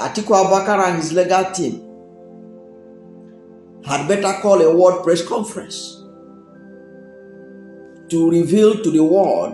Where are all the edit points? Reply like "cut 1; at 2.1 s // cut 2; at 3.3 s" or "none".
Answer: cut 1; at 2.3 s // cut 2; at 3.9 s // cut 3; at 5.7 s // cut 4; at 7.7 s